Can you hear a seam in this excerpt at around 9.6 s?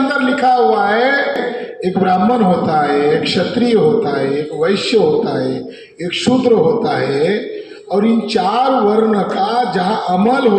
no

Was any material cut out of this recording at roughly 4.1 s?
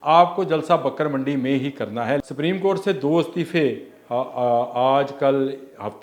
no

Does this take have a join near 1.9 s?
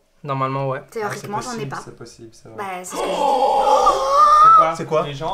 no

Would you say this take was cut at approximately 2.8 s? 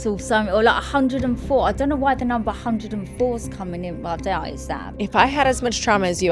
no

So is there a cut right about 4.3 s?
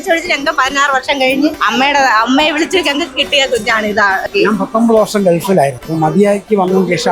yes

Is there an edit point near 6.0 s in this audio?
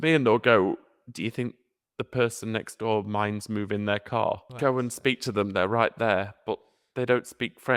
no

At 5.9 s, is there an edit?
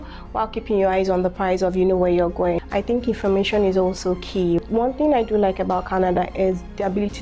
no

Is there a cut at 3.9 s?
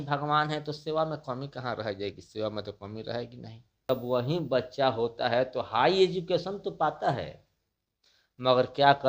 yes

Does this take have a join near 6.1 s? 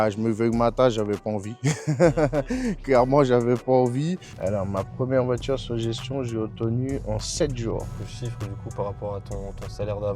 no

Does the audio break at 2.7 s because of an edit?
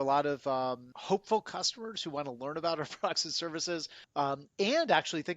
no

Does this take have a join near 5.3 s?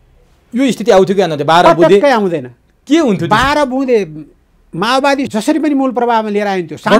yes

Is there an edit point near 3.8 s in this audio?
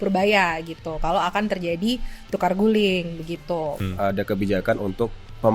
yes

